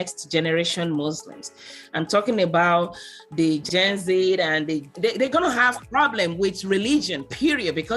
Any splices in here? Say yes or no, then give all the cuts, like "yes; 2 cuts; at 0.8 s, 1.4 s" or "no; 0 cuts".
yes; 2 cuts; at 3.6 s, 4.9 s